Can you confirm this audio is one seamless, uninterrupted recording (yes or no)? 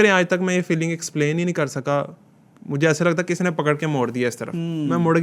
yes